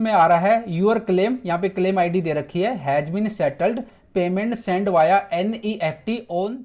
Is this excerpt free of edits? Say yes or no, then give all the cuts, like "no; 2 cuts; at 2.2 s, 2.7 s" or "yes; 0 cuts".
yes; 0 cuts